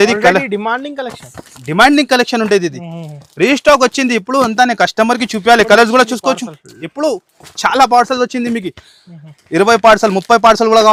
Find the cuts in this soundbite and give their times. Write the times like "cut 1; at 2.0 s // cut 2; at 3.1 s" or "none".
none